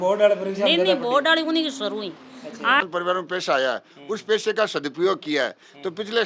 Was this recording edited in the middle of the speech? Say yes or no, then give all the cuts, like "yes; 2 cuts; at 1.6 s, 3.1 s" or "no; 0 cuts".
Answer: yes; 1 cut; at 2.8 s